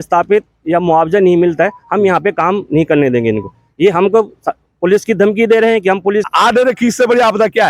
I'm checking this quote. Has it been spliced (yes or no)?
yes